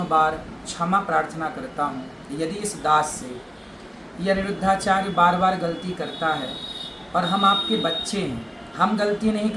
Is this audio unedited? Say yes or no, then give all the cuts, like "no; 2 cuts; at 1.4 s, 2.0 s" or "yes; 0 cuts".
yes; 0 cuts